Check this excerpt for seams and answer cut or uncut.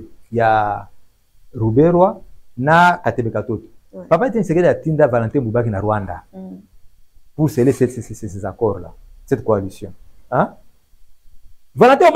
uncut